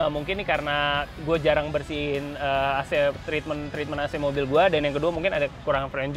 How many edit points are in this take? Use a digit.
0